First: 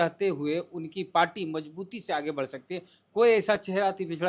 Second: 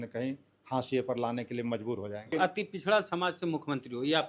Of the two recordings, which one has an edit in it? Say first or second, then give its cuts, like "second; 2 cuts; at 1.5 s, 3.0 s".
second; 1 cut; at 2.3 s